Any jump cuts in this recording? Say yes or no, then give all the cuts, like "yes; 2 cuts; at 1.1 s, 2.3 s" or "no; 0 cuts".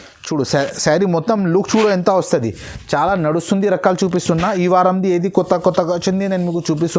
no; 0 cuts